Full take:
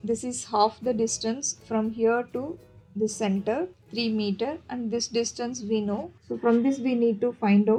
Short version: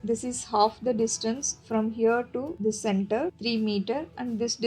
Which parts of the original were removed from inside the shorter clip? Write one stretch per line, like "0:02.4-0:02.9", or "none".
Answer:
0:02.5-0:02.9
0:03.7-0:03.9

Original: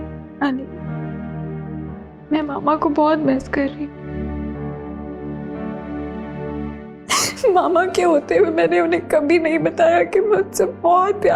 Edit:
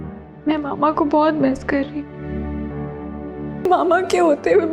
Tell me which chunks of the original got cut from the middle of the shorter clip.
0:05.5-0:07.5

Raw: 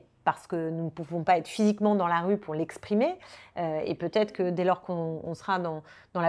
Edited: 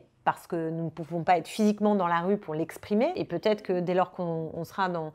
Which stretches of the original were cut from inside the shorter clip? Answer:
0:03.2-0:03.9

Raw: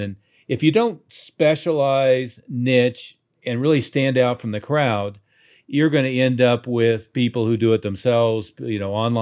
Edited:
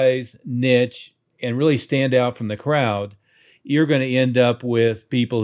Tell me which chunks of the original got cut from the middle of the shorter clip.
none

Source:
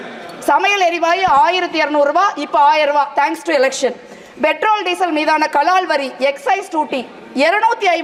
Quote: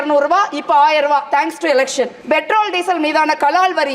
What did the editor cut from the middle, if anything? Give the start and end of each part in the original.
0:04.0-0:04.3

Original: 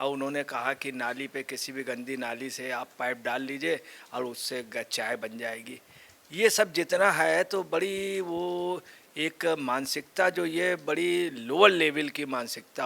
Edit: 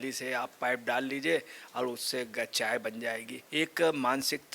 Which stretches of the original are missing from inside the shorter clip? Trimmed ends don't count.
0:05.7-0:09.0

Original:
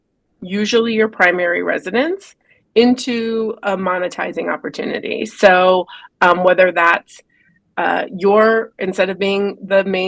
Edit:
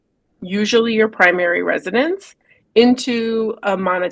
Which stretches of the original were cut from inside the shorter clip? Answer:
none

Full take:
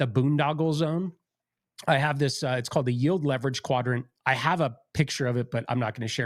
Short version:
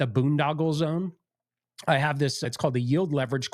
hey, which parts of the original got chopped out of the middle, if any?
0:02.5-0:02.6

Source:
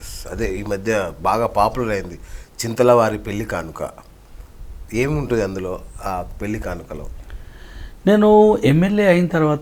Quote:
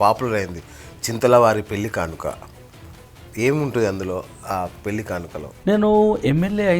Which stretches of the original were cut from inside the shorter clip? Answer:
0:07.1-0:07.9

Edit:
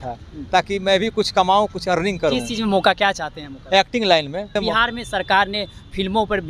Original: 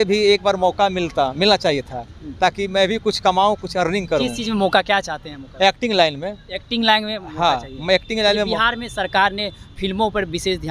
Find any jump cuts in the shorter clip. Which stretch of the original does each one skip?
0:06.4-0:08.4

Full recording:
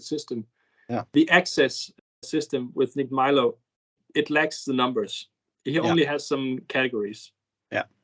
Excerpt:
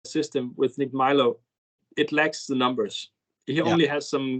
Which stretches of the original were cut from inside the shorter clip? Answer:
none

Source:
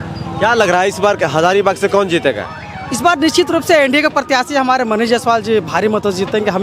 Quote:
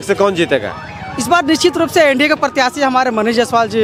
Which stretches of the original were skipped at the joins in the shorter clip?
none

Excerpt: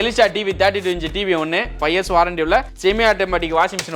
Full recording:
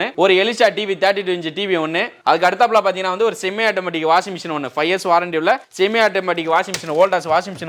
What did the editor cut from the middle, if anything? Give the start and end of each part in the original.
0:02.1-0:04.7

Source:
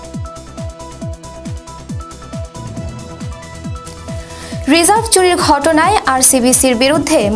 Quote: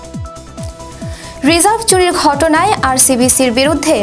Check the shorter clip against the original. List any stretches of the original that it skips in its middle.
0:01.4-0:04.6

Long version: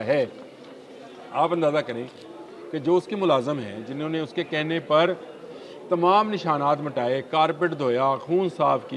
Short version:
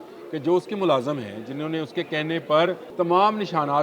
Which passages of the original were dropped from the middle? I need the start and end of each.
0:05.2-0:05.8

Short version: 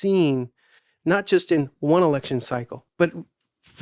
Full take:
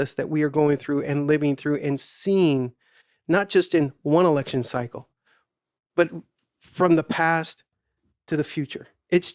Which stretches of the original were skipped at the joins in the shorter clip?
0:05.0-0:05.8

